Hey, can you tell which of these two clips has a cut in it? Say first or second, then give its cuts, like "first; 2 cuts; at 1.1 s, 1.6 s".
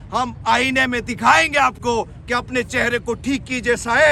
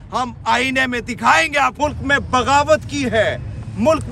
second; 1 cut; at 1.7 s